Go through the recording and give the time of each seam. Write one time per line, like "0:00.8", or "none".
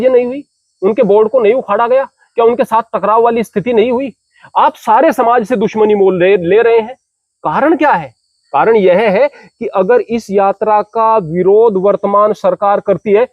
none

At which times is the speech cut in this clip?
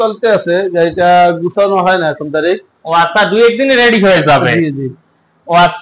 none

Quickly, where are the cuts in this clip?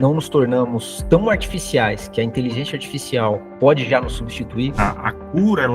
0:04.7

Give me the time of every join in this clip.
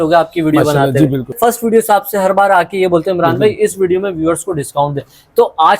0:01.3

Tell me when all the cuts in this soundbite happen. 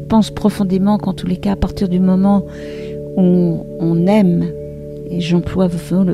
none

